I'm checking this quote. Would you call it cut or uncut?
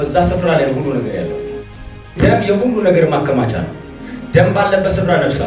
cut